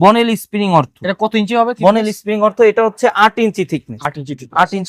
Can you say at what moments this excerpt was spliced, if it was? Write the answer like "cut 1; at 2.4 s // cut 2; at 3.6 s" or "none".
none